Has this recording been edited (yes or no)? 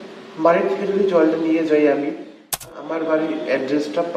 yes